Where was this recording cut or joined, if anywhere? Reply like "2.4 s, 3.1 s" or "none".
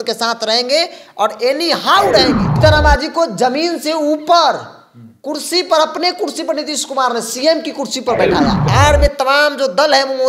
2.5 s, 8.6 s